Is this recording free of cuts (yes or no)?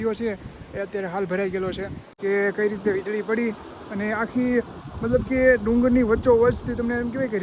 no